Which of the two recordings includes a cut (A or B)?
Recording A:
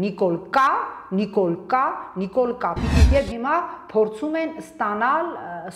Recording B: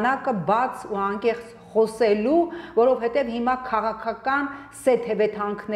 A